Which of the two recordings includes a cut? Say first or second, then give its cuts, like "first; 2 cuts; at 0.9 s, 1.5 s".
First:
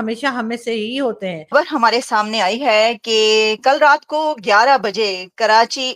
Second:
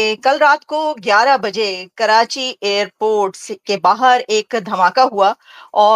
first; 1 cut; at 1.4 s